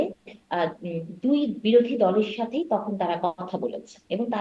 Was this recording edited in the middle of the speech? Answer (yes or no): no